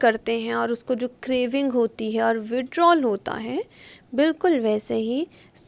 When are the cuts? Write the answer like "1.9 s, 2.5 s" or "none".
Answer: none